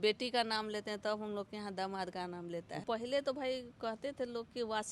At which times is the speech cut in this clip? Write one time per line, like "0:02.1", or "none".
0:02.8